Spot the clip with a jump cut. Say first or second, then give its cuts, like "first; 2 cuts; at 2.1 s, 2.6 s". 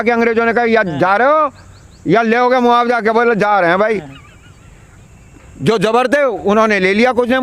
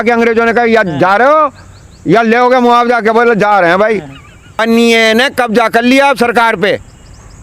second; 1 cut; at 4.6 s